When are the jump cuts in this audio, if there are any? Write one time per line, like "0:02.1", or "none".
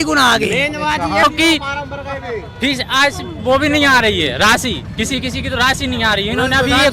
0:01.2